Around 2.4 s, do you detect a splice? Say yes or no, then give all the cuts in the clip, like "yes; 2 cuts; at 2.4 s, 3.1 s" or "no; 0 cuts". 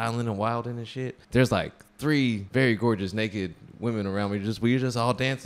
yes; 2 cuts; at 1.2 s, 2.4 s